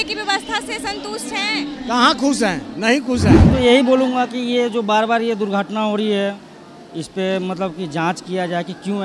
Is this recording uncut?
no; 1 cut; at 3.5 s

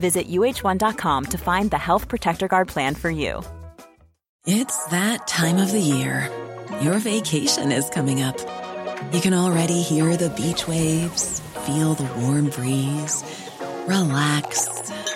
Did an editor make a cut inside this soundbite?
no; 0 cuts

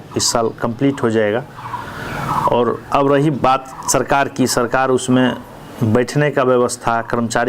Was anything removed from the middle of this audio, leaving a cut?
no; 0 cuts

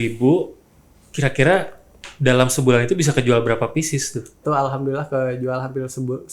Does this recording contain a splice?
yes; 1 cut; at 4.4 s

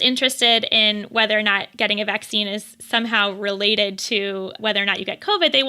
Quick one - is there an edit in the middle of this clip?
yes; 1 cut; at 4.5 s

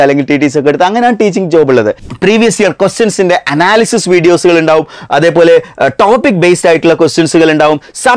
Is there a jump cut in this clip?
yes; 1 cut; at 2.0 s

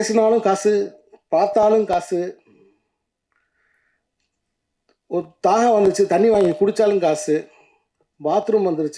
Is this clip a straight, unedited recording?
yes; 0 cuts

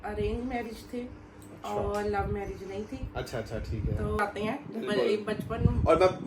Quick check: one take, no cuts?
no; 1 cut; at 4.2 s

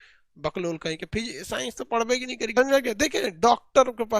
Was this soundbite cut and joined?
yes; 1 cut; at 2.6 s

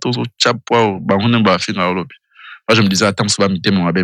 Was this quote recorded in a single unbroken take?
yes; 0 cuts

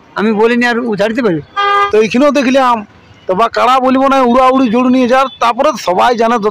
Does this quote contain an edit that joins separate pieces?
yes; 1 cut; at 1.8 s

